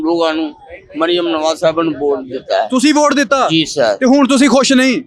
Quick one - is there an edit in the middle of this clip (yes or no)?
no